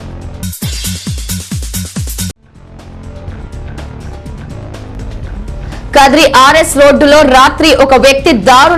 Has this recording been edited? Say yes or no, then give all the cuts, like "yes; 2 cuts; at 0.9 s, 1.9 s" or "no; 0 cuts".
yes; 2 cuts; at 4.3 s, 5.8 s